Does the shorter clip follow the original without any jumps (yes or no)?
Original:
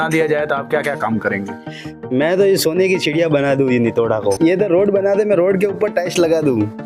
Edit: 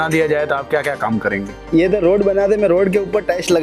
no